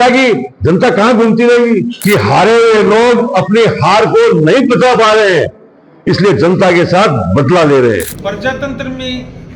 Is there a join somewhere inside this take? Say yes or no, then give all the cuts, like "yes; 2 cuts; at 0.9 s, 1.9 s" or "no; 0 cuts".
yes; 2 cuts; at 1.9 s, 8.1 s